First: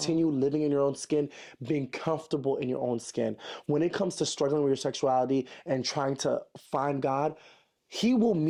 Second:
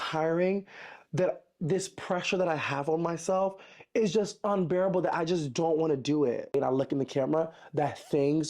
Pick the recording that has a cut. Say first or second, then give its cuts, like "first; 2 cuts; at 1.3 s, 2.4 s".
second; 1 cut; at 6.5 s